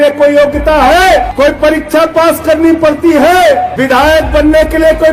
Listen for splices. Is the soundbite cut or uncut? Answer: cut